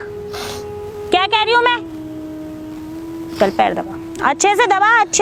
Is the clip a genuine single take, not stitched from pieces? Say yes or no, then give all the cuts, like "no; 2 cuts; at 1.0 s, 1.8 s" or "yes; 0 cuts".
yes; 0 cuts